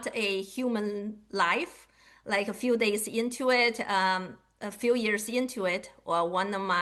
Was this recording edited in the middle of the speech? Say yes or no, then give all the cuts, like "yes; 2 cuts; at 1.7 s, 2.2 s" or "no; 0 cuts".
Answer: no; 0 cuts